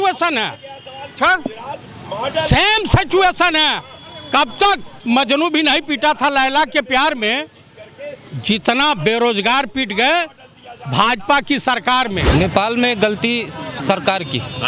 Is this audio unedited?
no; 1 cut; at 4.9 s

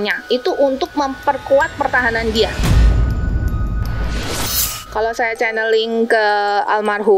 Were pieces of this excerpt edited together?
yes; 2 cuts; at 2.6 s, 4.7 s

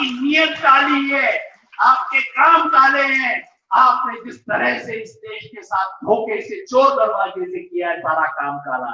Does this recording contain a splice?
no; 0 cuts

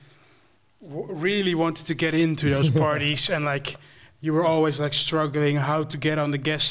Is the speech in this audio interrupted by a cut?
no; 0 cuts

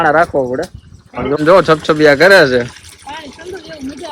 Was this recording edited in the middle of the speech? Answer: yes; 1 cut; at 1.4 s

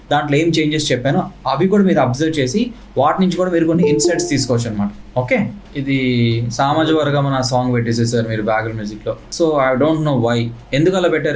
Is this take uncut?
no; 1 cut; at 5.7 s

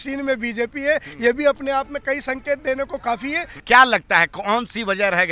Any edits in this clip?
yes; 1 cut; at 3.6 s

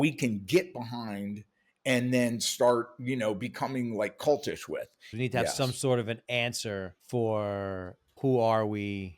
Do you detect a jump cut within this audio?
yes; 3 cuts; at 5.1 s, 7.0 s, 8.2 s

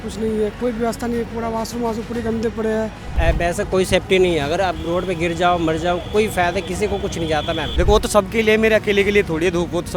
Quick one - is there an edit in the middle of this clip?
yes; 2 cuts; at 3.0 s, 7.7 s

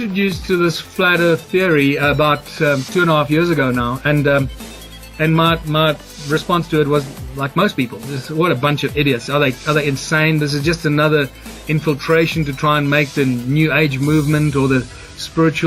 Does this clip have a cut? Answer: yes; 1 cut; at 5.1 s

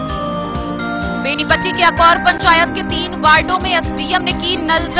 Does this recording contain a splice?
yes; 1 cut; at 1.2 s

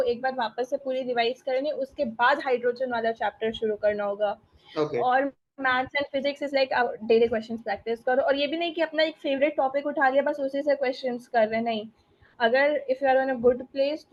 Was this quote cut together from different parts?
no; 0 cuts

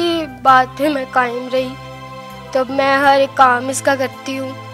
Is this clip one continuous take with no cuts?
yes; 0 cuts

